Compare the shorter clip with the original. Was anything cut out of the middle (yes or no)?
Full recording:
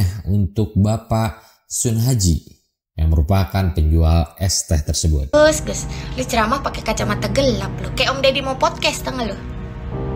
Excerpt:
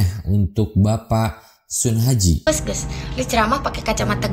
yes